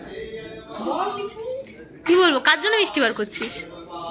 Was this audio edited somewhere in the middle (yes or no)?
no